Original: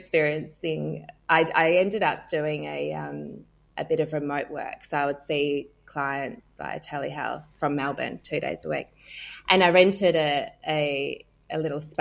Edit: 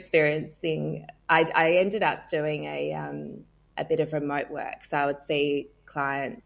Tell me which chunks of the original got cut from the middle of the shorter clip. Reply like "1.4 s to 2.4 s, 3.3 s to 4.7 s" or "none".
none